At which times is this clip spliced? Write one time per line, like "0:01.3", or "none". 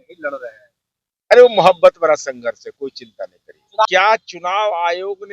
0:03.9